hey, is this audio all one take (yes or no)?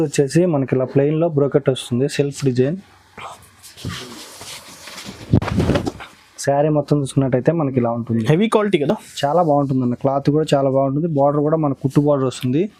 yes